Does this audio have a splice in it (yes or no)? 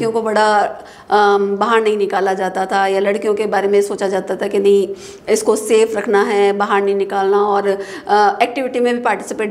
no